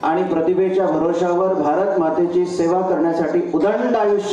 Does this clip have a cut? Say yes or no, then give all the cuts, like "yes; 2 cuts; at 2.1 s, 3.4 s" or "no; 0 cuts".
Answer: no; 0 cuts